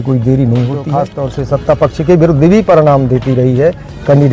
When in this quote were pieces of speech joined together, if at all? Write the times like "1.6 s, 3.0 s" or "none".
1.2 s